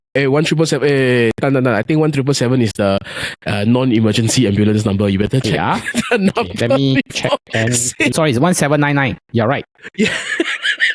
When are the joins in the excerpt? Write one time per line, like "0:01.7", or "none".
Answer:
0:08.1